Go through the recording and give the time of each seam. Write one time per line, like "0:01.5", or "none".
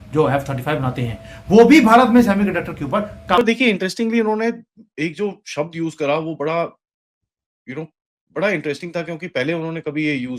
0:03.4